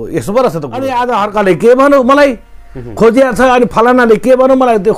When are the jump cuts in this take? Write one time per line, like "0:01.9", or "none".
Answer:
0:01.0